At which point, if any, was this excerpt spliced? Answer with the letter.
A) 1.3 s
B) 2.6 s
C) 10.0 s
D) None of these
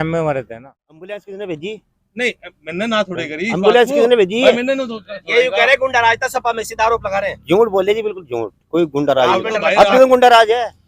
A